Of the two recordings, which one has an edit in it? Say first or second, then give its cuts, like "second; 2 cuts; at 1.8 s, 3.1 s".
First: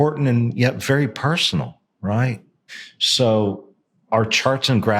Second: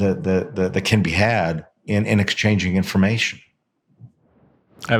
first; 1 cut; at 2.7 s